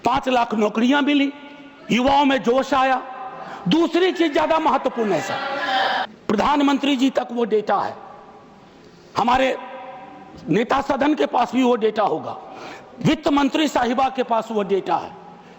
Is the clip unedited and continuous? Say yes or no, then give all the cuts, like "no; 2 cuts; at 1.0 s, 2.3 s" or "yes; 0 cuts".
no; 1 cut; at 6.1 s